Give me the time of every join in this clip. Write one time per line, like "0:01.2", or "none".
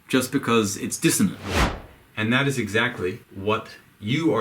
0:01.5
0:03.3